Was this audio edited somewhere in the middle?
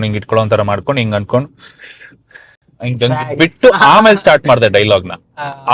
no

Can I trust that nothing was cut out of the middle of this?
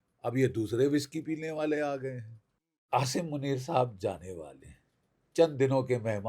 no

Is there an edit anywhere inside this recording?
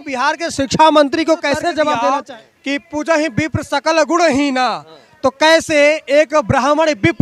yes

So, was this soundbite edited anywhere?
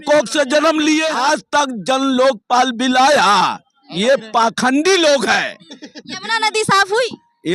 yes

